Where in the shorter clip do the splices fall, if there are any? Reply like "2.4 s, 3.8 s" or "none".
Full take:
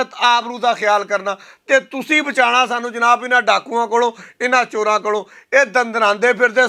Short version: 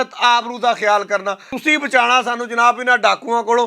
1.5 s